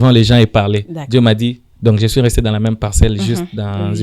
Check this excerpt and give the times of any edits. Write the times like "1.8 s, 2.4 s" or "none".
1.7 s